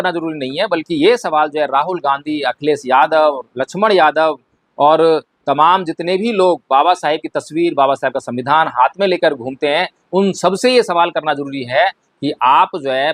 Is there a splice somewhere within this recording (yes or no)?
no